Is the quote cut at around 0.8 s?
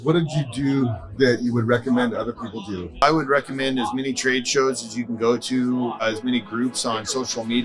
yes; 3 cuts; at 0.8 s, 3.0 s, 6.0 s

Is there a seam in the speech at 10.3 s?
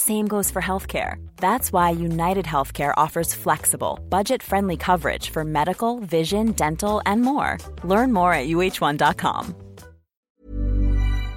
yes; 1 cut; at 10.3 s

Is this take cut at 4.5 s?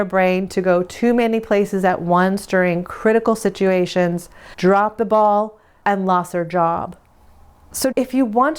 no; 1 cut; at 7.7 s

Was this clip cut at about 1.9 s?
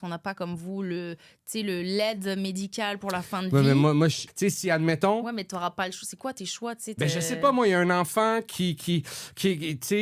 no; 1 cut; at 4.3 s

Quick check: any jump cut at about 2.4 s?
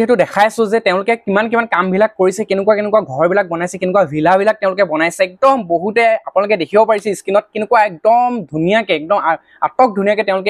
no; 0 cuts

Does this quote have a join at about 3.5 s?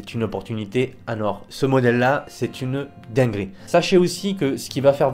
yes; 1 cut; at 3.5 s

